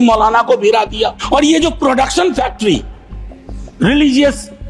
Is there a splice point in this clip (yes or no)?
yes